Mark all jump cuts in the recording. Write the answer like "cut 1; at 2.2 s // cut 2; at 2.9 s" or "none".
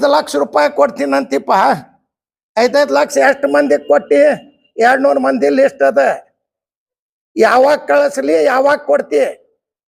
none